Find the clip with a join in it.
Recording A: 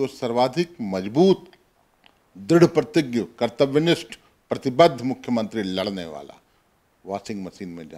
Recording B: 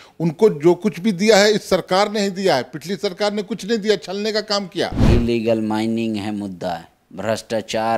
B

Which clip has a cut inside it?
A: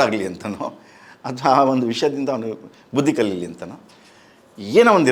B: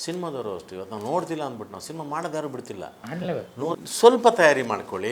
B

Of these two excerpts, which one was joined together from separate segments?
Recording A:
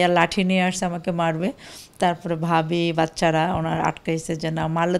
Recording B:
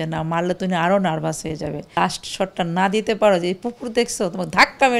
B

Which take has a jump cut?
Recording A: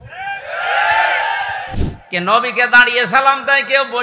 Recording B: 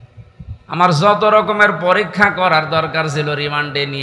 A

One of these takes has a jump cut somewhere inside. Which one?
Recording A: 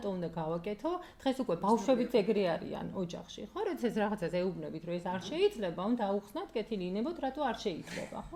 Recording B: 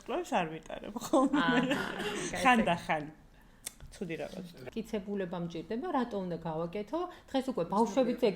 B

